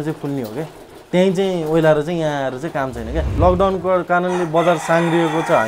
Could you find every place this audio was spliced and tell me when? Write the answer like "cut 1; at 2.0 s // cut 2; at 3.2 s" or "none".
cut 1; at 3.3 s